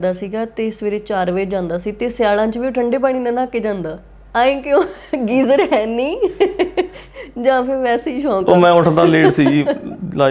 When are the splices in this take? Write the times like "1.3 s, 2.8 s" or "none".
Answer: none